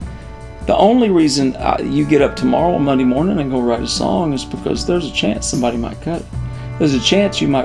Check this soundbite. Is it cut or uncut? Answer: uncut